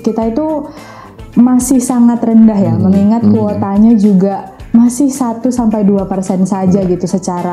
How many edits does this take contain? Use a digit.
0